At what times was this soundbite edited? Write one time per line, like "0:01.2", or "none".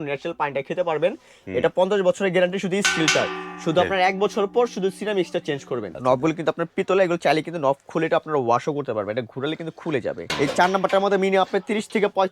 0:05.9
0:10.3